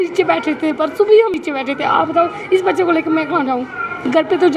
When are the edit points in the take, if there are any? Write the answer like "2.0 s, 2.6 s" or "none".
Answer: 1.3 s